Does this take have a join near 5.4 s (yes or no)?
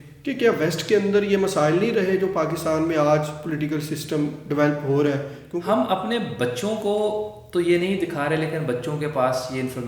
yes